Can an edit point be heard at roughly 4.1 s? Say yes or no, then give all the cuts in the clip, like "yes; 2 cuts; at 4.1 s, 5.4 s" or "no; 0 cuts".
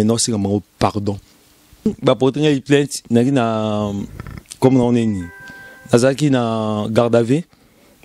no; 1 cut; at 1.9 s